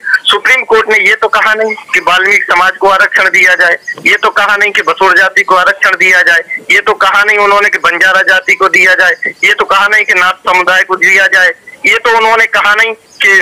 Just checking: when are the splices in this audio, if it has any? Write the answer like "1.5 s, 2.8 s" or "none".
none

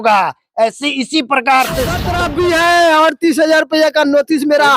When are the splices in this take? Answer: 2.1 s

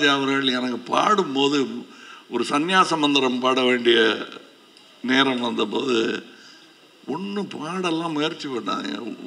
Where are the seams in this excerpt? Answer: none

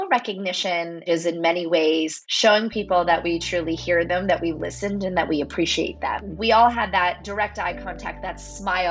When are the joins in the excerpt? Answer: 1.1 s, 2.2 s, 6.3 s, 7.2 s

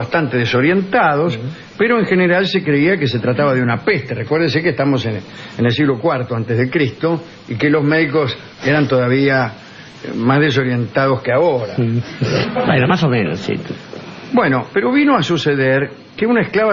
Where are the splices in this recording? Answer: 12.8 s

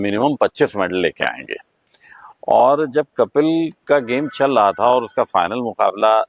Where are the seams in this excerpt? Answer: none

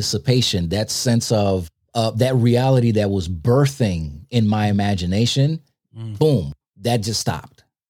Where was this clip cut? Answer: 1.8 s, 6.6 s

